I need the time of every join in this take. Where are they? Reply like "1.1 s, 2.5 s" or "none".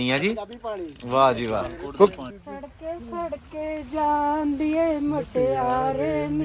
1.8 s